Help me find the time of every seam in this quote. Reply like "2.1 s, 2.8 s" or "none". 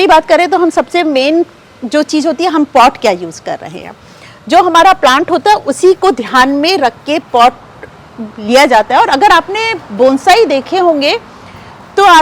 none